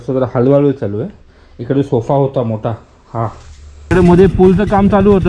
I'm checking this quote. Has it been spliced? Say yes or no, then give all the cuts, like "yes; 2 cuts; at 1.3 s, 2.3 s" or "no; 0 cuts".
yes; 1 cut; at 3.9 s